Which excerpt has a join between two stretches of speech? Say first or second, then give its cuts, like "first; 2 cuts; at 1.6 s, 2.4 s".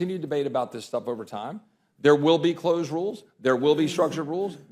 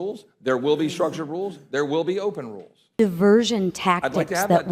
second; 1 cut; at 2.9 s